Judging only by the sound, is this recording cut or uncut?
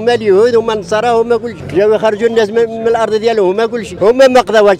cut